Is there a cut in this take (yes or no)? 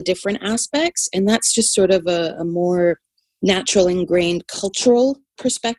no